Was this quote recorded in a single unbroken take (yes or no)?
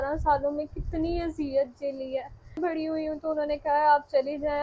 no